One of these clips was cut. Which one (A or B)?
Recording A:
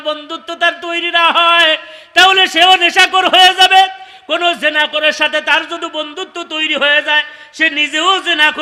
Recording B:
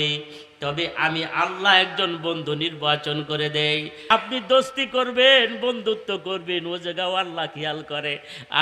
B